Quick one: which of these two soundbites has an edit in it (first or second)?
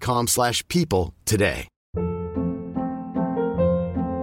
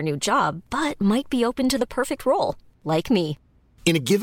first